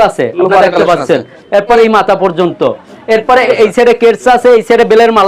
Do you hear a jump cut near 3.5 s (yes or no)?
yes